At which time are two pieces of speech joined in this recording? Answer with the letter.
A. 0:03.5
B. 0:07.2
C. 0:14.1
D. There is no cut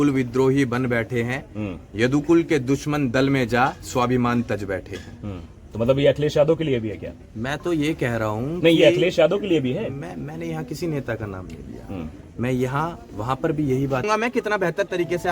C